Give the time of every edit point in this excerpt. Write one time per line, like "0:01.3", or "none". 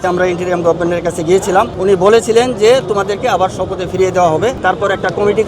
0:01.7
0:04.6

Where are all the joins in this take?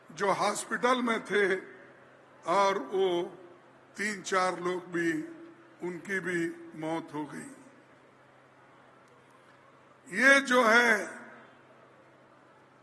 none

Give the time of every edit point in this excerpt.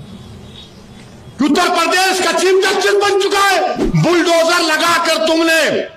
0:03.8

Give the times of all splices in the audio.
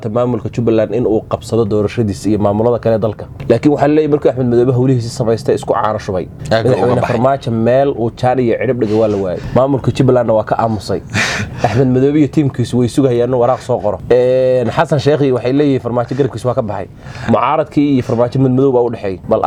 none

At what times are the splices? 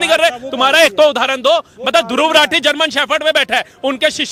none

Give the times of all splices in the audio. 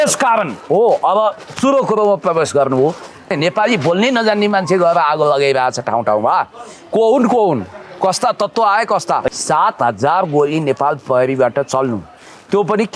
0:03.3
0:09.3

